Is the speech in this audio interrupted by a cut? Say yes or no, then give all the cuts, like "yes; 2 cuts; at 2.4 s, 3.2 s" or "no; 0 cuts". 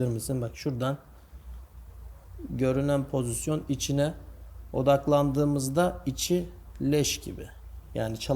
no; 0 cuts